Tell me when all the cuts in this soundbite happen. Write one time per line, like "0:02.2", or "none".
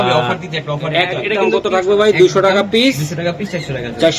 0:01.3